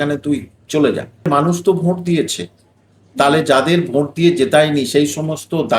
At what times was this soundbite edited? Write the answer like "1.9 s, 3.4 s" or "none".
1.3 s